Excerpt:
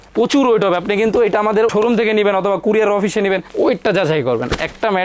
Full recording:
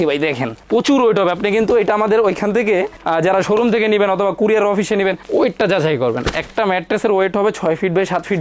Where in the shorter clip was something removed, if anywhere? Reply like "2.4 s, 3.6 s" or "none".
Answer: 1.7 s